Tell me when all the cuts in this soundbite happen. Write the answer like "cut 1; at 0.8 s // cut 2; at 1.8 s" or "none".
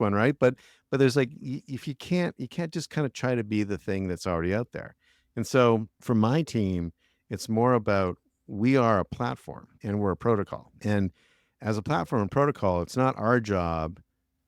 none